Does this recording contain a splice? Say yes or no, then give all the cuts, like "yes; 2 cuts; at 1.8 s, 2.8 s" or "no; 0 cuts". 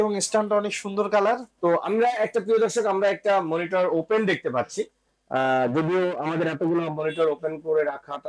yes; 1 cut; at 1.5 s